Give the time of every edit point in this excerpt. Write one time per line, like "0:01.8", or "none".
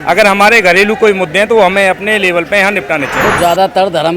0:03.2